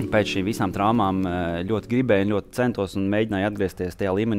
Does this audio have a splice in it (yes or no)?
no